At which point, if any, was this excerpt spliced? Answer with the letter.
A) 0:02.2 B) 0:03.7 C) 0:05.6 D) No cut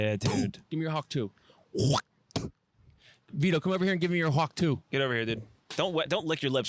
C